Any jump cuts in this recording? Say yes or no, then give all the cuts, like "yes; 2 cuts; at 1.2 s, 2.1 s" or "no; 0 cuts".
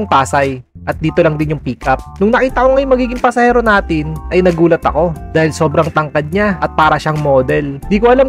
yes; 1 cut; at 5.2 s